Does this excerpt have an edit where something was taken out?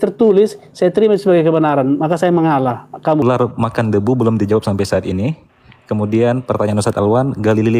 yes; 1 cut; at 3.2 s

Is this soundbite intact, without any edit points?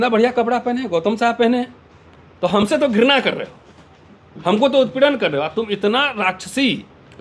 yes; 0 cuts

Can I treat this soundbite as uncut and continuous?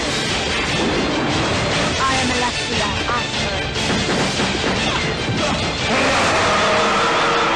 yes; 0 cuts

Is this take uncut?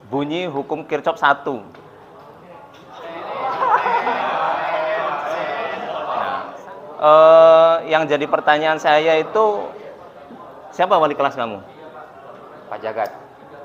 no; 1 cut; at 6.4 s

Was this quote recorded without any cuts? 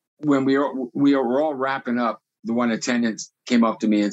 no; 1 cut; at 2.3 s

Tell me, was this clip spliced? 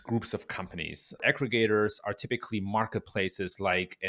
yes; 1 cut; at 1.2 s

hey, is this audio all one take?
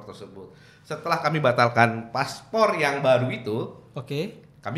yes; 0 cuts

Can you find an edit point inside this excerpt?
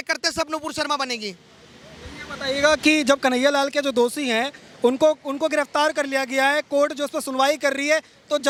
no; 0 cuts

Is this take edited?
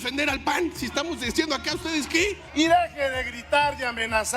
yes; 1 cut; at 2.4 s

